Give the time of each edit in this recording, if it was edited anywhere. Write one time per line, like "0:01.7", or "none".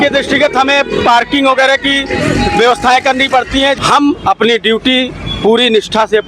0:03.8